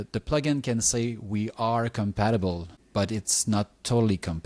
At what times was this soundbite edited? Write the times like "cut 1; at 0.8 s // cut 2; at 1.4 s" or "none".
cut 1; at 2.7 s